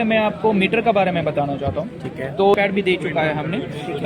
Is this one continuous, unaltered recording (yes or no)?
no